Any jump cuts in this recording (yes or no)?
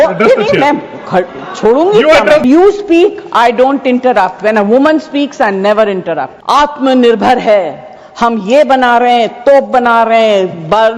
yes